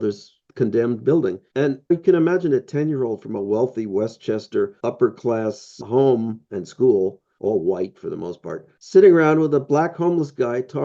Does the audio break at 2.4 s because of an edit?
no; 0 cuts

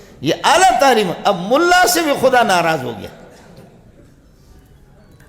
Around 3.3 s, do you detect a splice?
no; 0 cuts

